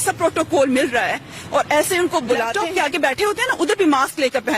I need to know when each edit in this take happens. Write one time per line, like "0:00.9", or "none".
0:02.6